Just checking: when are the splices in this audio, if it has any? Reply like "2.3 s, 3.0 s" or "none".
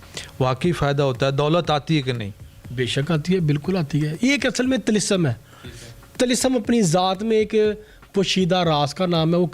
none

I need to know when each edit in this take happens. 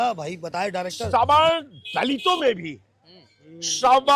1.0 s

